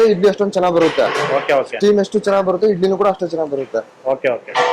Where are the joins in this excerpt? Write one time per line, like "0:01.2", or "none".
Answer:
none